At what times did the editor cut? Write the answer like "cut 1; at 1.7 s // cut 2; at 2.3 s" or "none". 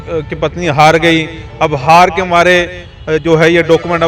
none